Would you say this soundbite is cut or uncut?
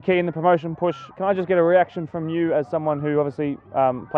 cut